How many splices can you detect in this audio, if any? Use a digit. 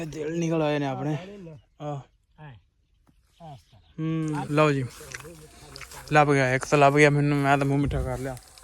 1